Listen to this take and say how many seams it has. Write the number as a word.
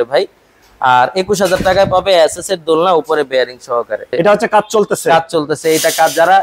one